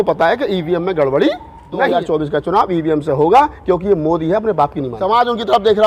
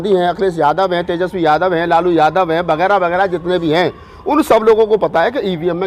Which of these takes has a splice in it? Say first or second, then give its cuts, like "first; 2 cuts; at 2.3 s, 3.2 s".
first; 2 cuts; at 1.9 s, 4.9 s